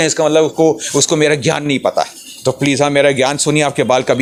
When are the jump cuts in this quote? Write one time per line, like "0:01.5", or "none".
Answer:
none